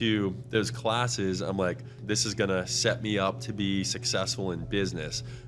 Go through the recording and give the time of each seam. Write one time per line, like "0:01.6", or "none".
0:02.0